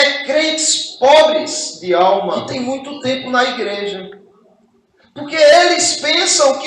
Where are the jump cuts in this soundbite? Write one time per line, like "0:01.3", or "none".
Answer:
0:02.5